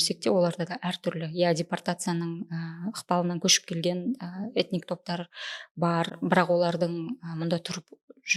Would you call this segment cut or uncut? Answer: uncut